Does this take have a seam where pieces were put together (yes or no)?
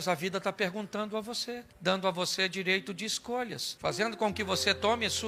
no